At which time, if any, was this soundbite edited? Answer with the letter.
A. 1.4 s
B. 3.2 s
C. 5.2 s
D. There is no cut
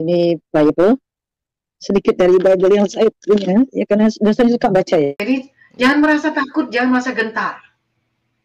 C